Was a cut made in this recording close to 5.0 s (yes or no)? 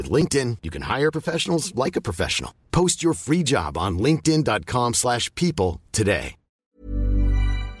no